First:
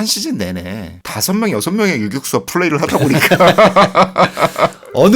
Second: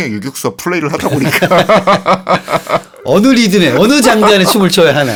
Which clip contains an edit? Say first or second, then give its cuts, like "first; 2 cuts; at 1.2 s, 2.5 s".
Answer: first; 1 cut; at 1.0 s